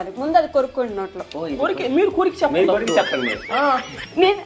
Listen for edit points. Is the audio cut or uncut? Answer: uncut